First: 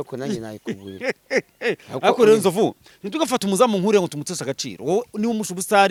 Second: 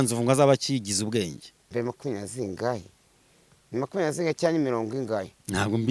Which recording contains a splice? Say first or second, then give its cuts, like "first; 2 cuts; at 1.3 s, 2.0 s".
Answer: second; 1 cut; at 1.7 s